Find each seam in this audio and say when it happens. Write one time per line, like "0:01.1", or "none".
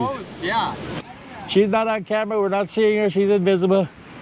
0:01.0